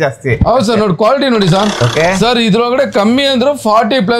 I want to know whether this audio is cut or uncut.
cut